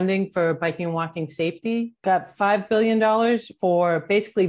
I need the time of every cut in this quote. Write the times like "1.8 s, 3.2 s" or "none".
1.9 s